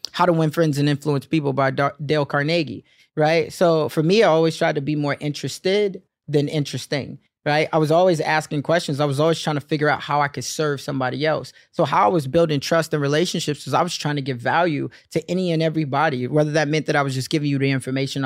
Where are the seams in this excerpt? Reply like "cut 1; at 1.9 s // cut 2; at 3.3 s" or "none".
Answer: none